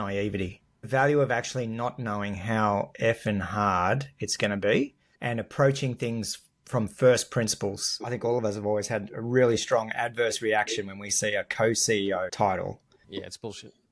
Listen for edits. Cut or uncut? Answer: cut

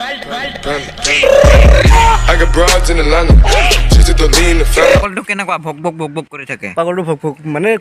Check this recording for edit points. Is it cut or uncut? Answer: uncut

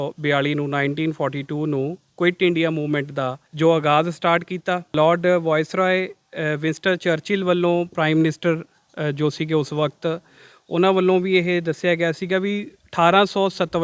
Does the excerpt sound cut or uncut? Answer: cut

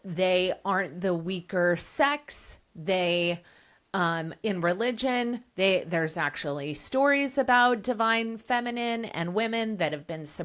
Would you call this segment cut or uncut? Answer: uncut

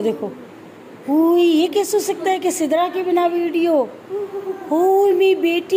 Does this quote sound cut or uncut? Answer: uncut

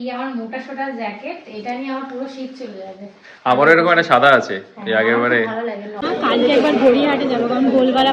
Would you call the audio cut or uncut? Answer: cut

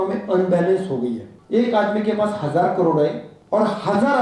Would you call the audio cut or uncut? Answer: cut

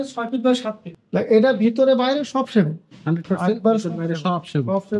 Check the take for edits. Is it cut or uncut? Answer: cut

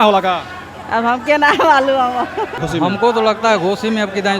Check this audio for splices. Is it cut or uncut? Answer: cut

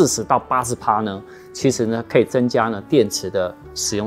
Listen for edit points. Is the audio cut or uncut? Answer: uncut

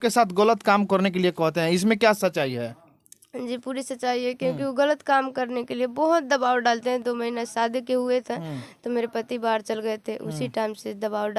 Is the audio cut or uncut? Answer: uncut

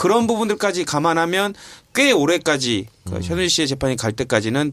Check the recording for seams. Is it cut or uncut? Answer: cut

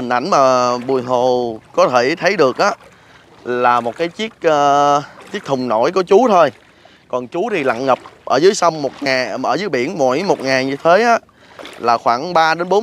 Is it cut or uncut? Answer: uncut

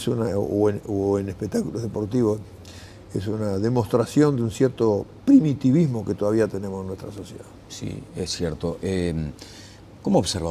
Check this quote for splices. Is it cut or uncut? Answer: uncut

